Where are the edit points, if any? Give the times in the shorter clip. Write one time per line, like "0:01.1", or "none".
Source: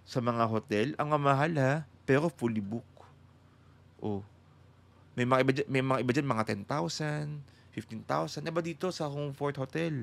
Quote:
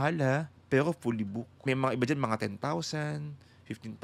0:01.6